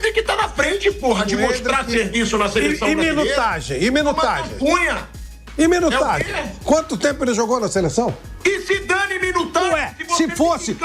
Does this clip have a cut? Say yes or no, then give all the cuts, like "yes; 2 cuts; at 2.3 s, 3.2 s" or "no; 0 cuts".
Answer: no; 0 cuts